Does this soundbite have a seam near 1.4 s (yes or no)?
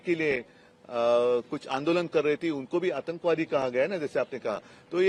no